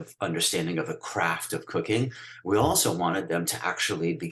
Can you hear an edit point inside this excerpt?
no; 0 cuts

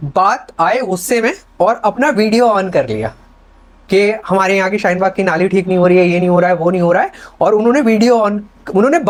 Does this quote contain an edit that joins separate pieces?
no; 0 cuts

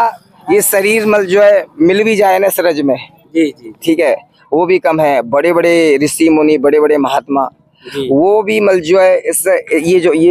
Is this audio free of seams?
yes; 0 cuts

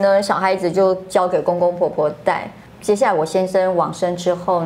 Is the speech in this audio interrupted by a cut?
yes; 1 cut; at 2.7 s

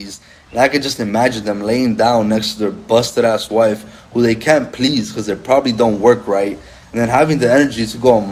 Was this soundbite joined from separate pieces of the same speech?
no; 0 cuts

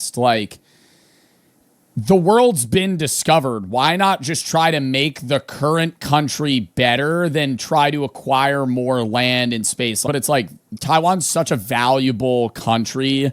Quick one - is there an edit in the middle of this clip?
yes; 1 cut; at 10.0 s

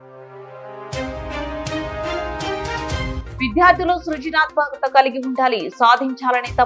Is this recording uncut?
no; 1 cut; at 3.2 s

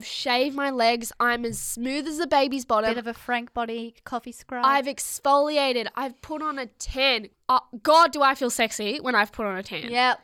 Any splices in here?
no; 0 cuts

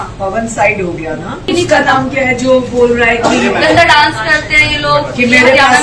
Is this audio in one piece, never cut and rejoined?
no; 1 cut; at 1.5 s

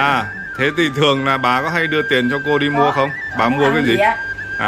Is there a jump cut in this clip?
no; 0 cuts

